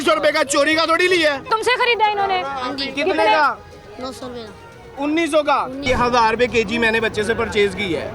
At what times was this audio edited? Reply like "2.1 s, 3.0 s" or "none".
1.5 s, 5.8 s